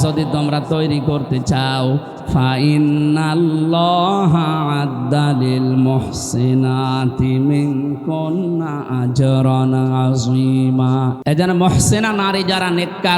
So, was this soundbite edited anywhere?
yes; 1 cut; at 11.2 s

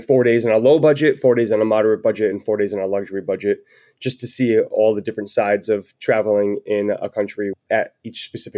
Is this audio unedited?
no; 1 cut; at 7.6 s

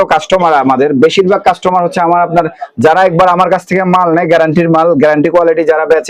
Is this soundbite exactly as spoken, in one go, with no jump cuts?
yes; 0 cuts

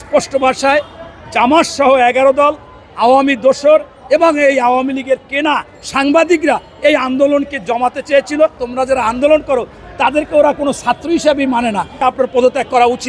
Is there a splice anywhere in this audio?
yes; 2 cuts; at 8.6 s, 12.0 s

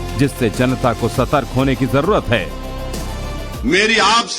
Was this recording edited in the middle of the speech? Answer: yes; 1 cut; at 2.6 s

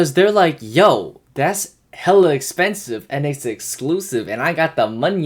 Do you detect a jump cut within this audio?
no; 0 cuts

